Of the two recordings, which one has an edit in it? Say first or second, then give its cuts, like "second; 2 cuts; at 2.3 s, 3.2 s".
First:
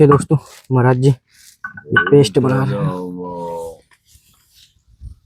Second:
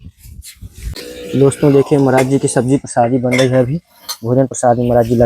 second; 1 cut; at 0.9 s